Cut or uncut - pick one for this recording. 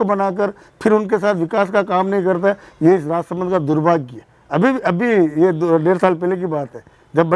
uncut